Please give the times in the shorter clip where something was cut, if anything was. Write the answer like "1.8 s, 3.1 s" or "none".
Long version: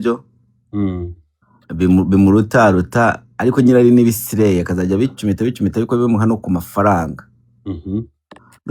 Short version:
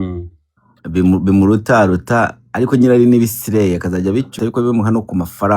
4.4 s